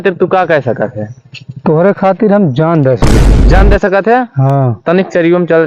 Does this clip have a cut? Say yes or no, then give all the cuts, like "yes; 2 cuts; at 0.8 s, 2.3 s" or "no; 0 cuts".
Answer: no; 0 cuts